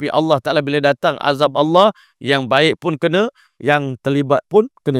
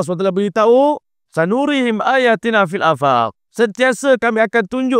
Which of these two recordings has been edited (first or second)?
second